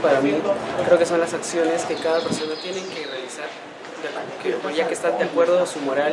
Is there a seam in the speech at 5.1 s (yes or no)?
no